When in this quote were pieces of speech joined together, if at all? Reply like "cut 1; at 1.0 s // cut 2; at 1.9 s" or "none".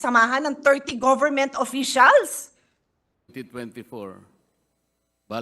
cut 1; at 3.3 s